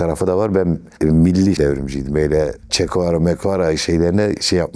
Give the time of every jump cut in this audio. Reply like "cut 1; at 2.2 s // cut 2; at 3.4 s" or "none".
cut 1; at 1.6 s

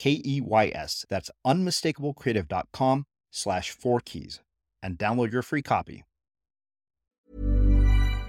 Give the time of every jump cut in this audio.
cut 1; at 7.2 s

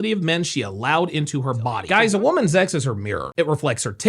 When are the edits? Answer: cut 1; at 1.8 s

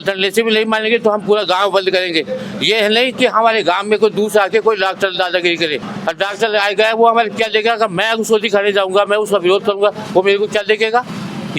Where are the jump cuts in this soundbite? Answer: none

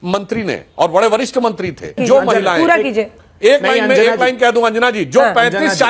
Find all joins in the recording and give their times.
cut 1; at 2.0 s

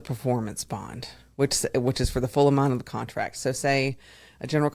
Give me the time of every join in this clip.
none

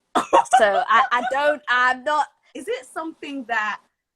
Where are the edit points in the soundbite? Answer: cut 1; at 2.5 s

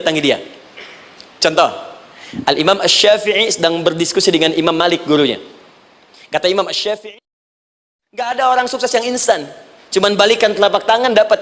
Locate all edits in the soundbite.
cut 1; at 7.6 s

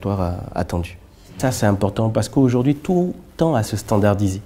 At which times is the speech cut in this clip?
cut 1; at 1.4 s

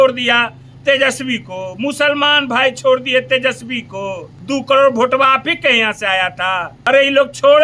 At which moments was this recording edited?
none

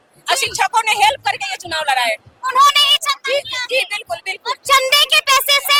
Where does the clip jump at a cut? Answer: none

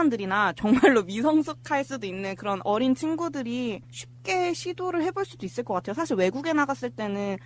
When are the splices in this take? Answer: cut 1; at 3.4 s

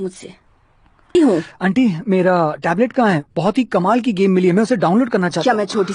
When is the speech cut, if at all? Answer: cut 1; at 1.1 s

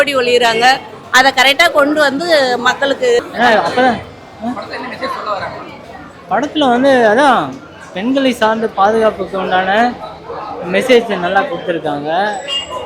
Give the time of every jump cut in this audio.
cut 1; at 3.2 s

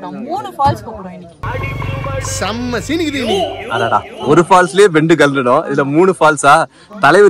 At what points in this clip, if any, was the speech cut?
none

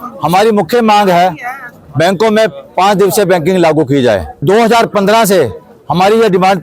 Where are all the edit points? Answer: cut 1; at 4.4 s

